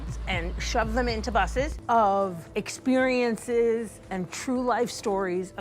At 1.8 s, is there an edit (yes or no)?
yes